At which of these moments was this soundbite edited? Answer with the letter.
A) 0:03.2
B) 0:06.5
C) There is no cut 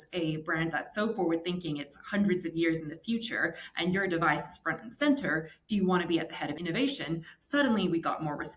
B